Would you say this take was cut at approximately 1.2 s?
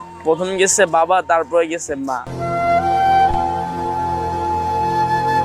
no; 0 cuts

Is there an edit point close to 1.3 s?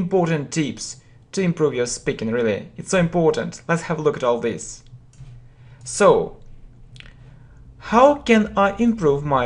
no; 0 cuts

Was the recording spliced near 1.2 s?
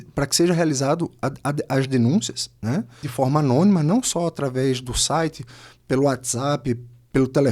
no; 1 cut; at 3.1 s

